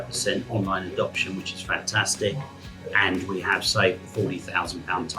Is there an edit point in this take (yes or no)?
no